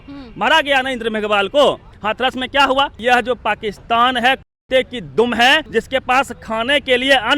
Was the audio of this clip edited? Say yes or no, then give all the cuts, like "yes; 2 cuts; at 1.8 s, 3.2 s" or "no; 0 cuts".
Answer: yes; 3 cuts; at 1.9 s, 3.0 s, 5.6 s